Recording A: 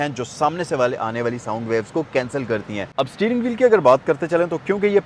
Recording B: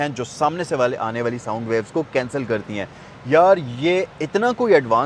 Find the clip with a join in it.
A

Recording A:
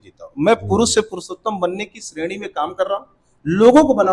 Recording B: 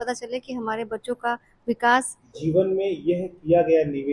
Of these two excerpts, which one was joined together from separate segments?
B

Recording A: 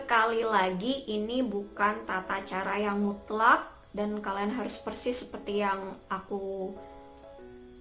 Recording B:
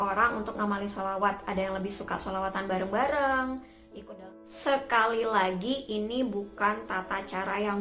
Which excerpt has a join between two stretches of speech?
B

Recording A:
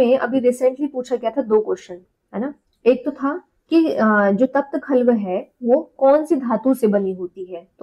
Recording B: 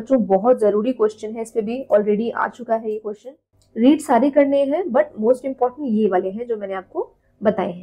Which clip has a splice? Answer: B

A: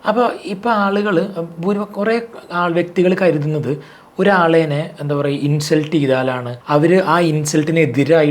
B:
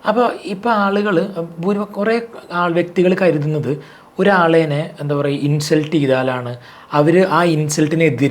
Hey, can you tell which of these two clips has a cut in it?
A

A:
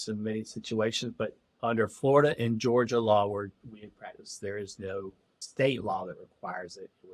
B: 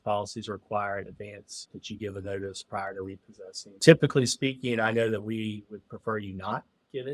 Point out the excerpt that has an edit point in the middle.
B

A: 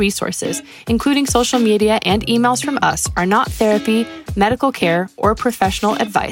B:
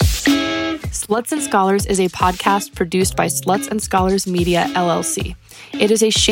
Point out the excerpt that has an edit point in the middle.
B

